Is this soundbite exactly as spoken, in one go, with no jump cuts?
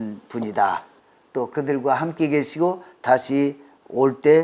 no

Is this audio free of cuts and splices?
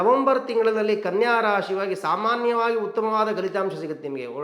yes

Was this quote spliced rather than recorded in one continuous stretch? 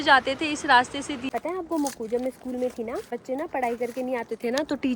yes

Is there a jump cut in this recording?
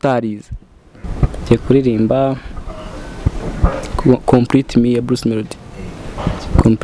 yes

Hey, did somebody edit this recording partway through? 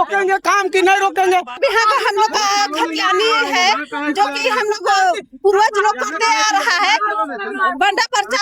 yes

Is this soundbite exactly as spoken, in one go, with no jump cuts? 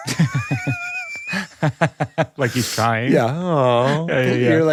yes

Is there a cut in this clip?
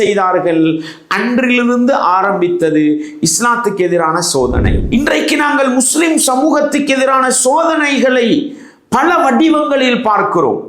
yes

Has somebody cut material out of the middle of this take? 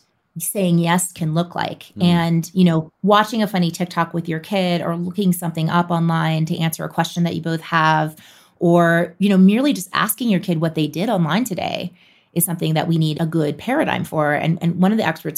yes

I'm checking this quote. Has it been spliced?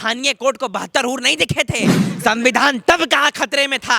yes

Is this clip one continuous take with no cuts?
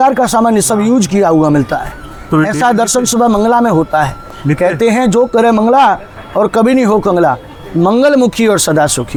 yes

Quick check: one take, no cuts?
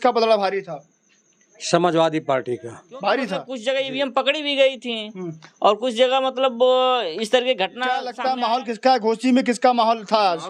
no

